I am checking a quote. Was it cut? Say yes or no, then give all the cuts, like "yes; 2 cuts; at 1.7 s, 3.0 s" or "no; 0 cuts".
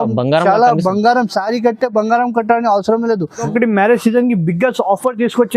yes; 1 cut; at 3.5 s